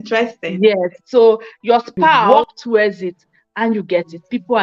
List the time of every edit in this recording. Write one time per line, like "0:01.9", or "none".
0:02.3